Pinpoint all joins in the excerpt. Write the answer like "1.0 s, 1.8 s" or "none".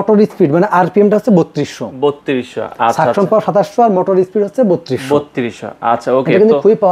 none